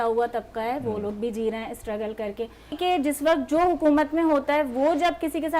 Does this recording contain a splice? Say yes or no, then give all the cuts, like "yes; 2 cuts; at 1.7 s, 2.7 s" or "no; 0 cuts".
yes; 1 cut; at 2.8 s